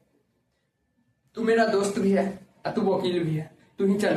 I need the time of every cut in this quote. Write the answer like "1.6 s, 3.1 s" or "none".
none